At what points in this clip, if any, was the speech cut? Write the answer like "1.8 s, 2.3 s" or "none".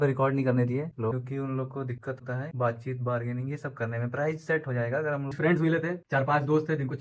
1.1 s, 5.3 s